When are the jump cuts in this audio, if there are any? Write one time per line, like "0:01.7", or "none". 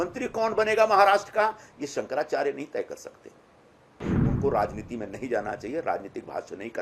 0:04.0